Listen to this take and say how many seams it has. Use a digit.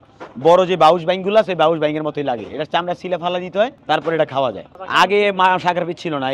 2